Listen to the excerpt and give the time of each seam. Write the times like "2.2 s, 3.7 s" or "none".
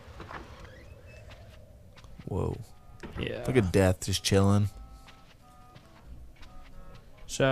3.4 s